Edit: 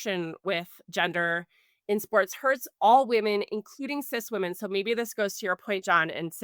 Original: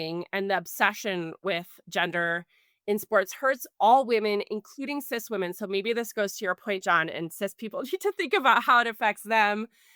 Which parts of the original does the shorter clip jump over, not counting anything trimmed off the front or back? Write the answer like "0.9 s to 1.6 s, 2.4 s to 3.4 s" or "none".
none